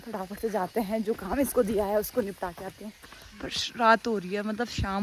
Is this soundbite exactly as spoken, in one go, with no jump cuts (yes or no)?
yes